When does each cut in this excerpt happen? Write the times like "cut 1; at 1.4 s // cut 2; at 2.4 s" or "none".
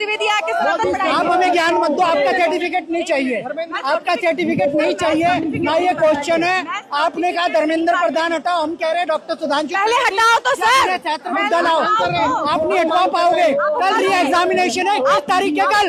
none